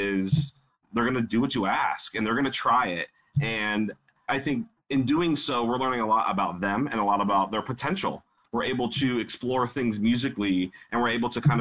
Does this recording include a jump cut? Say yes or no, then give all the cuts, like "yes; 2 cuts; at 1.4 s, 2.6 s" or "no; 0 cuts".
yes; 3 cuts; at 0.9 s, 4.4 s, 8.3 s